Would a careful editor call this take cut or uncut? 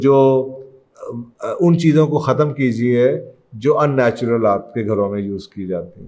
uncut